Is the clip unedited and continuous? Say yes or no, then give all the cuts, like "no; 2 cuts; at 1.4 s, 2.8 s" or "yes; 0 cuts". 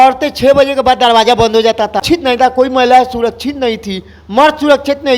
no; 1 cut; at 2.0 s